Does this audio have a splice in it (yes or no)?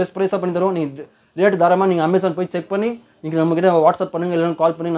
no